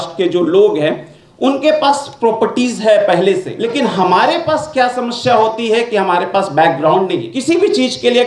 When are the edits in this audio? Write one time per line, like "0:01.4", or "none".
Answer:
0:03.6
0:07.3